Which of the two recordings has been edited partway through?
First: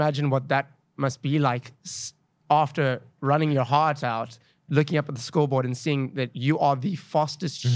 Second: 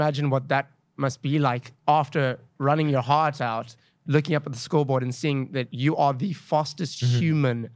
second; 1 cut; at 1.7 s

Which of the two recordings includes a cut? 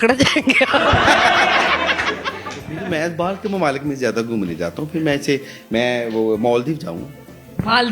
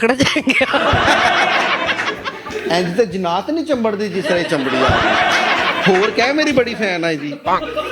second; 1 cut; at 2.5 s

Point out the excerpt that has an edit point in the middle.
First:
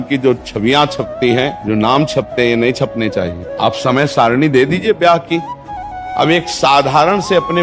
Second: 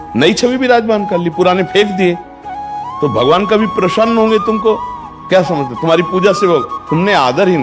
first; 3 cuts; at 1.6 s, 3.4 s, 6.0 s

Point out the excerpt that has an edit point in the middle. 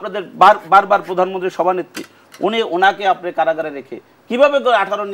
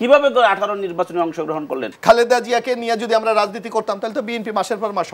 second; 1 cut; at 1.9 s

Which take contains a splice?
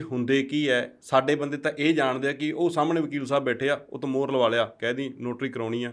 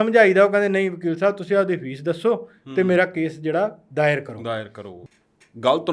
second; 1 cut; at 4.9 s

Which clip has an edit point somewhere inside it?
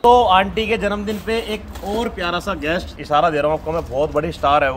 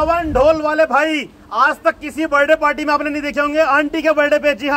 first; 1 cut; at 2.9 s

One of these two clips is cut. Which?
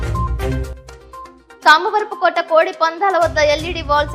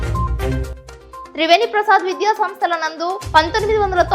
second; 1 cut; at 1.3 s

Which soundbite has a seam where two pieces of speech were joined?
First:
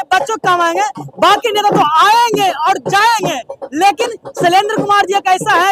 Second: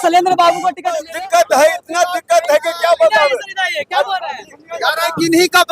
second; 1 cut; at 1.0 s

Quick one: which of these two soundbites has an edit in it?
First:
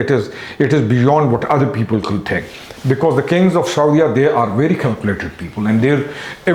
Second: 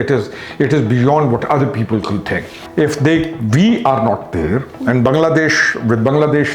second; 1 cut; at 2.6 s

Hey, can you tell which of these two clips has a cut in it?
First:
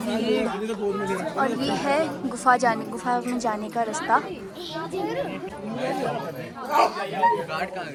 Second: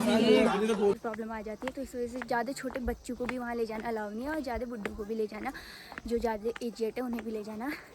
second; 1 cut; at 1.0 s

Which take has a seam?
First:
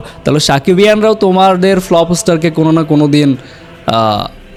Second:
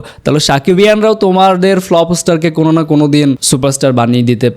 second; 1 cut; at 3.4 s

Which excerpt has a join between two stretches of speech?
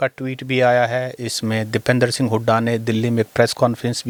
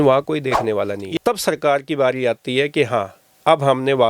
second; 1 cut; at 1.0 s

